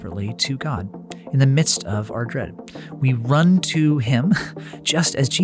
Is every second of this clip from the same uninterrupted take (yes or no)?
yes